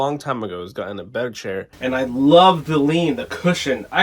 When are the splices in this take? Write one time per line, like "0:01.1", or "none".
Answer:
0:01.7